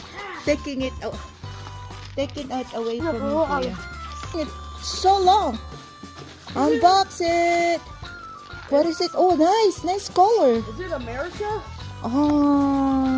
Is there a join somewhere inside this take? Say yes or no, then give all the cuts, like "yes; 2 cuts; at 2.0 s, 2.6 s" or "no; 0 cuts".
yes; 1 cut; at 4.3 s